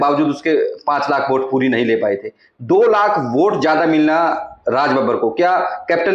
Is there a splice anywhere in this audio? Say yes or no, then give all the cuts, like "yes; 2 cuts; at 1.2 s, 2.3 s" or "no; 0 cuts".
no; 0 cuts